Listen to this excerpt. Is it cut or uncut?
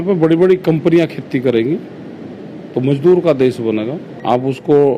cut